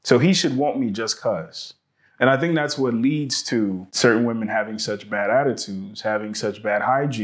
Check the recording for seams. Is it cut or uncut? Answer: cut